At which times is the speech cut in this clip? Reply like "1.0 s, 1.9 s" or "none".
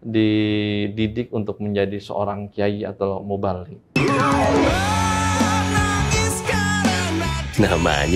3.7 s